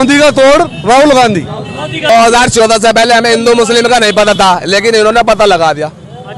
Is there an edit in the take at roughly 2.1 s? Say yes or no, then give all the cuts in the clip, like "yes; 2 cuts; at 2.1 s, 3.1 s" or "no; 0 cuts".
yes; 1 cut; at 2.1 s